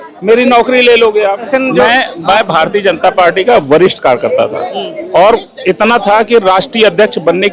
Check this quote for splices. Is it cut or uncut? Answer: cut